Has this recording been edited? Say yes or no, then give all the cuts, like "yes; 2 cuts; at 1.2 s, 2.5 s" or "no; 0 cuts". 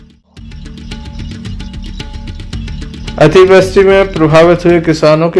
yes; 2 cuts; at 1.0 s, 3.0 s